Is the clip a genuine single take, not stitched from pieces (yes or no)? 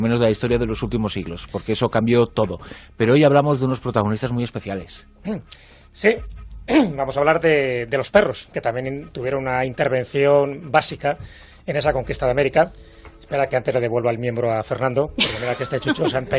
yes